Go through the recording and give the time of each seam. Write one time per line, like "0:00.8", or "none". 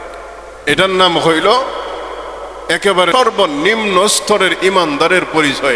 0:03.1